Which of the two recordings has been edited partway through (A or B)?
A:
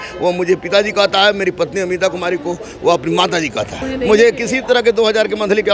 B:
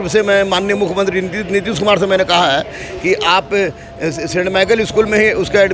A